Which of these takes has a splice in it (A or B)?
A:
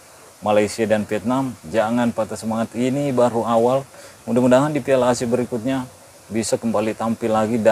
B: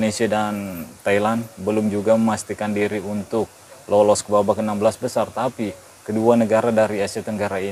A